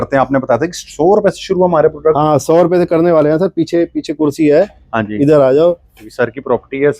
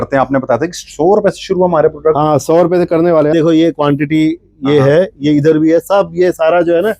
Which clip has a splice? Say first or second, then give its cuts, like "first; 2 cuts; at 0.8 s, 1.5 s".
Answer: second; 1 cut; at 3.3 s